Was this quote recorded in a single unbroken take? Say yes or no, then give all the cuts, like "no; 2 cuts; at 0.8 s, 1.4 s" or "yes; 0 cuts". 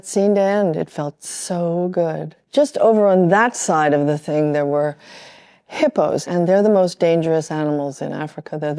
no; 2 cuts; at 2.3 s, 6.2 s